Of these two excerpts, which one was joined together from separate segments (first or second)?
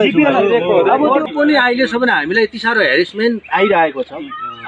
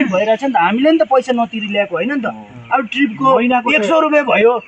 first